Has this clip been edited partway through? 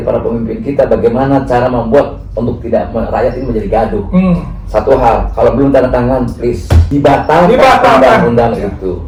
no; 0 cuts

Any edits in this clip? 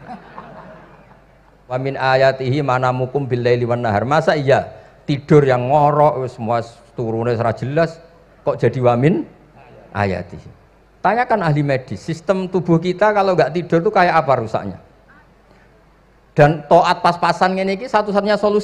yes; 1 cut; at 1.8 s

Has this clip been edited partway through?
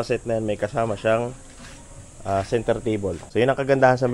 yes; 1 cut; at 3.2 s

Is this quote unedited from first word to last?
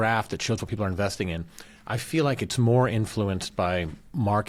yes; 0 cuts

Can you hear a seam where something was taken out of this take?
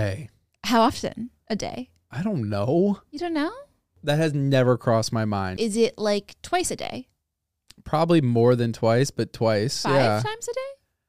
yes; 1 cut; at 5.5 s

